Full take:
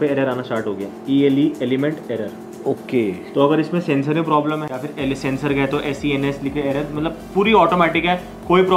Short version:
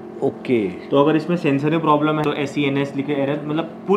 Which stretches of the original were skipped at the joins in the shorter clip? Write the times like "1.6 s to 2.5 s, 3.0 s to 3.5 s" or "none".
4.7 s to 5.7 s